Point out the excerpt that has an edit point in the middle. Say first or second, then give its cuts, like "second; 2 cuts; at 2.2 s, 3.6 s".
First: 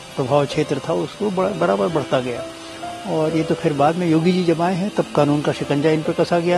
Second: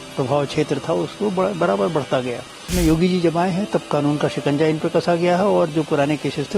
second; 1 cut; at 2.7 s